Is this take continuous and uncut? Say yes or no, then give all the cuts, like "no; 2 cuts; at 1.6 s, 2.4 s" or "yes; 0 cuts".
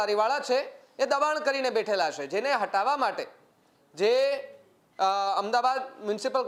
yes; 0 cuts